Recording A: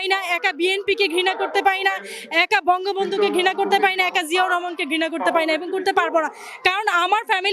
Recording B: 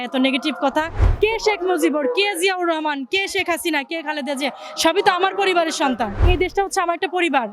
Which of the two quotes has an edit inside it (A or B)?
B